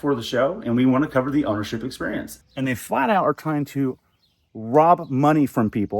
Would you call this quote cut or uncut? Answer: cut